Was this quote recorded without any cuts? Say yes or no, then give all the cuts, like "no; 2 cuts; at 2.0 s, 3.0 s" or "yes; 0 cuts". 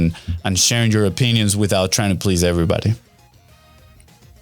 yes; 0 cuts